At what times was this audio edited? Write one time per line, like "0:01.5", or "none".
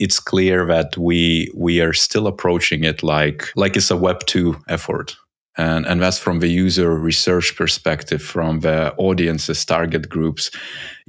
0:03.4